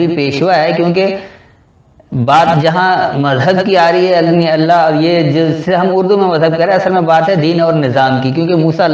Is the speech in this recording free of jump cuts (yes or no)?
yes